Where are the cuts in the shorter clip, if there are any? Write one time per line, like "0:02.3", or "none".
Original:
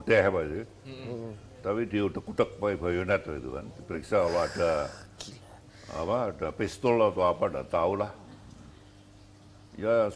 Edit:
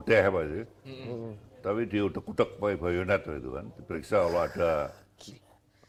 none